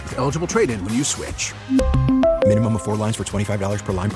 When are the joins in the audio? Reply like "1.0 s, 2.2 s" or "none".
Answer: none